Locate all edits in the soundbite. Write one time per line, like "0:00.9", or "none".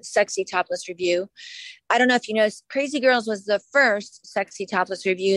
none